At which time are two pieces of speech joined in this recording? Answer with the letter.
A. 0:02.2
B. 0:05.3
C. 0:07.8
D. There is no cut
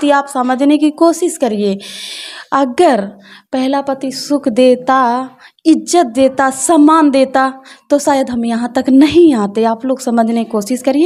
D